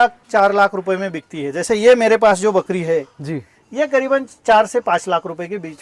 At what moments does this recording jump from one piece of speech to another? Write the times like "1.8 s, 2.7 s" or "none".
none